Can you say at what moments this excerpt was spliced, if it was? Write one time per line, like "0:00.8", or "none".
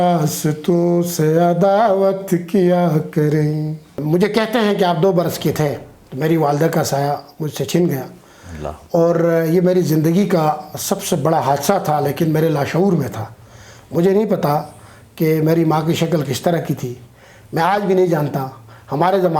0:04.0